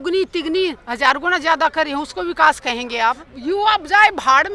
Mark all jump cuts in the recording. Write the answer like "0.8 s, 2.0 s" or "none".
3.3 s